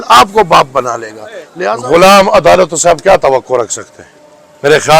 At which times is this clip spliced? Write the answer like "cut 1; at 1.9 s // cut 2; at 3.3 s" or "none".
cut 1; at 1.6 s